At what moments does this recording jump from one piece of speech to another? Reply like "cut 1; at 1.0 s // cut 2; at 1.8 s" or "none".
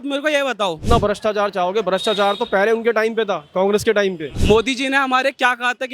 cut 1; at 0.8 s // cut 2; at 4.3 s